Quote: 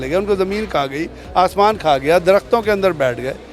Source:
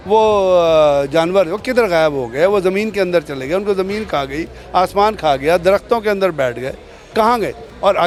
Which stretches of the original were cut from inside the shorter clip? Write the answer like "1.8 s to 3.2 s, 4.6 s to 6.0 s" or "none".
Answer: none